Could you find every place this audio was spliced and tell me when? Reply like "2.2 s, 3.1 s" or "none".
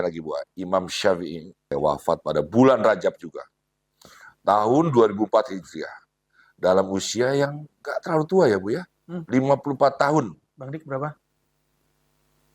1.7 s